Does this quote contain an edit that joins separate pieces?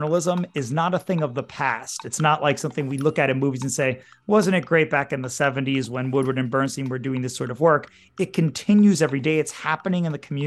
no; 0 cuts

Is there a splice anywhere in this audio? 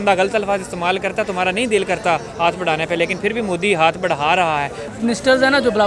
yes; 1 cut; at 4.9 s

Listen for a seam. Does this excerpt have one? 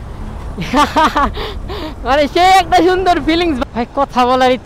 yes; 1 cut; at 3.6 s

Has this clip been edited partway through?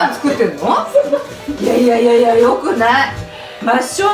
yes; 1 cut; at 1.6 s

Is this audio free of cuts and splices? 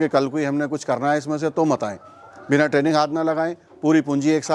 yes; 0 cuts

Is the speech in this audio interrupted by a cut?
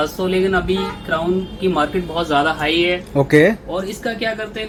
no; 0 cuts

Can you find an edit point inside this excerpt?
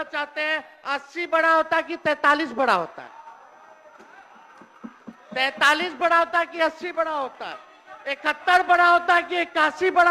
no; 0 cuts

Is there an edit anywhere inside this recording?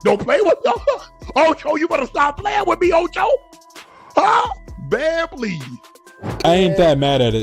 yes; 1 cut; at 6.4 s

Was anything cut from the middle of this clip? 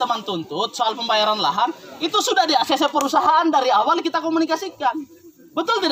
no; 0 cuts

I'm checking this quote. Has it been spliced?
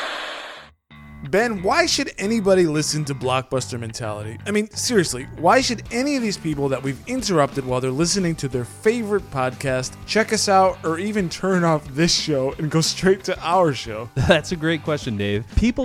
yes; 1 cut; at 1.0 s

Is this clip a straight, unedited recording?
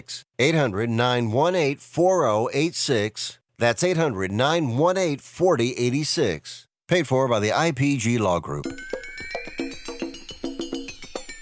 no; 1 cut; at 8.6 s

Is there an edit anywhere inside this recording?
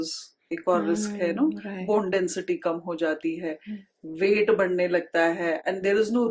no; 0 cuts

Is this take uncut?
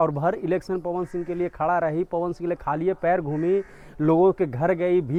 yes; 0 cuts

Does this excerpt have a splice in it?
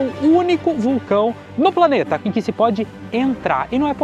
yes; 1 cut; at 2.2 s

